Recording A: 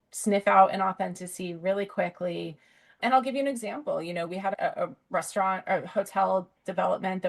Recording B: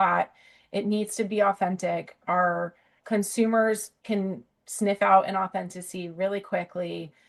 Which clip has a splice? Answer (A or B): A